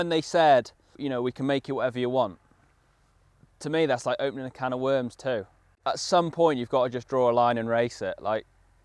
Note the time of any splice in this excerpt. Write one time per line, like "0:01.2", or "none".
0:01.0

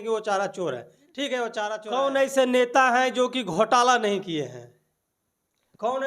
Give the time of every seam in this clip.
0:01.8

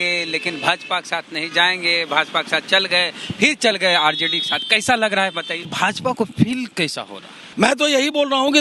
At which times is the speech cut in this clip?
0:05.6
0:07.4

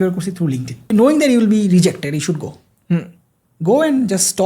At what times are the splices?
0:00.9

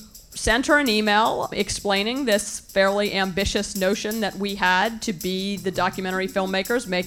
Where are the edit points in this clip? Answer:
0:01.5

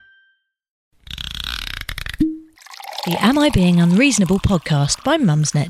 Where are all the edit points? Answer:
0:00.9

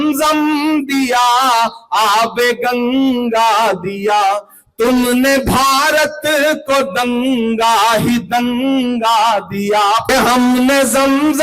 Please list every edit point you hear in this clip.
0:10.1

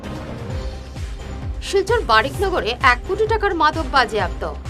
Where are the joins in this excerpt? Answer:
none

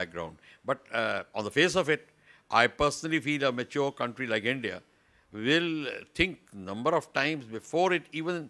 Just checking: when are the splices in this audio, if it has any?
none

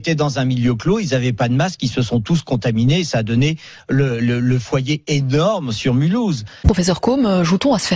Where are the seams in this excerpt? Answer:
0:06.5

